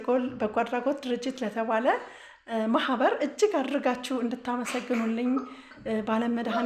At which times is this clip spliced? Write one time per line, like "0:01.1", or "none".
none